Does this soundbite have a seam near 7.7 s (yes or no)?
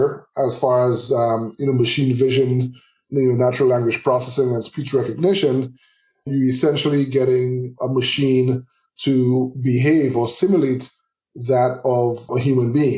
yes